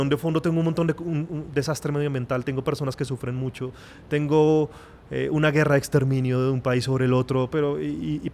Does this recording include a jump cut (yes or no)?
no